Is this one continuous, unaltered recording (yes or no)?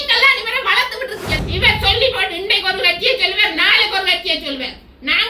no